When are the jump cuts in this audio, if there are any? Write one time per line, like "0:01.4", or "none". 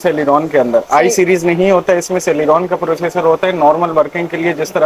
none